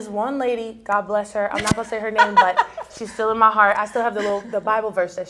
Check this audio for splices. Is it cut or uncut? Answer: uncut